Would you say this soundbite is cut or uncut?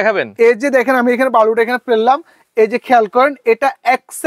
uncut